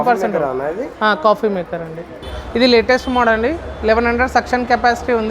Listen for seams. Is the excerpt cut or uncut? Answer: cut